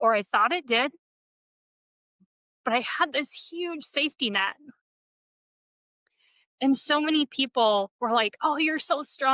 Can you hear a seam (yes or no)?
no